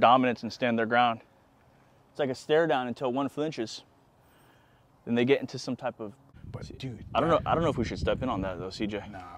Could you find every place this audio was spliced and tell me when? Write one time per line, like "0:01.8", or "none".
0:06.3